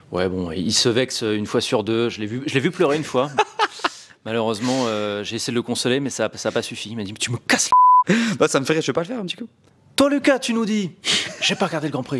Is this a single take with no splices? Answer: no; 1 cut; at 8.1 s

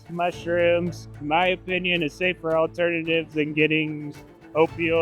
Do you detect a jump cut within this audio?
no; 0 cuts

